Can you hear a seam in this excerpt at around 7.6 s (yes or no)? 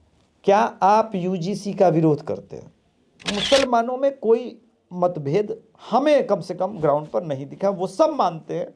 no